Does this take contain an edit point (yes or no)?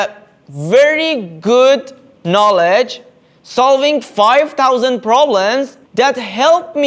no